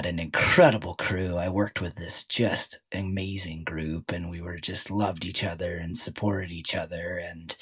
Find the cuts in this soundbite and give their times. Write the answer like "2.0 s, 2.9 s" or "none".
none